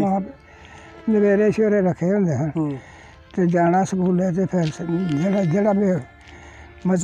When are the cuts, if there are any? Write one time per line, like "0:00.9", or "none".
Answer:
none